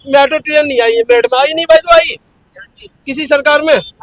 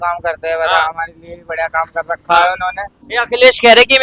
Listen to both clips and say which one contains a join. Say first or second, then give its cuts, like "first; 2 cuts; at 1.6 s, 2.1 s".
second; 1 cut; at 2.9 s